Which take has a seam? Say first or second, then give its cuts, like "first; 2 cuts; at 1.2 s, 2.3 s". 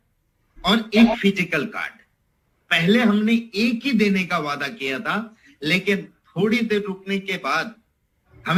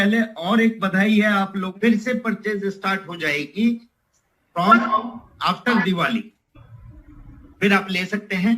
second; 1 cut; at 1.6 s